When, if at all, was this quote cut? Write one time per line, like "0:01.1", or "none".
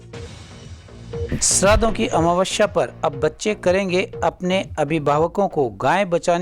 0:01.3